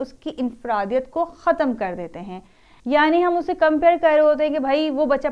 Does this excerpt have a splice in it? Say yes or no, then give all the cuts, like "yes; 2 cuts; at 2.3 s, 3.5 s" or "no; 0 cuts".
no; 0 cuts